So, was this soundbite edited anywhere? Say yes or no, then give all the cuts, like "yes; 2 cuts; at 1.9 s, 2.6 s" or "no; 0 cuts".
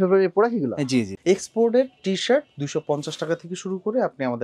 yes; 1 cut; at 1.1 s